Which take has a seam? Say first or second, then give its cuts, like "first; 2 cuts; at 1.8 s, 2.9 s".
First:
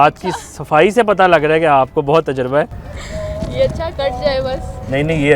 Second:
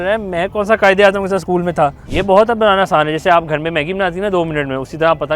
second; 1 cut; at 2.0 s